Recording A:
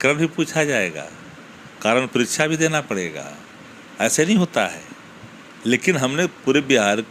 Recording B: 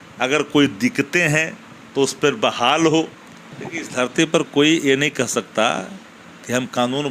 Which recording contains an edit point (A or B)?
B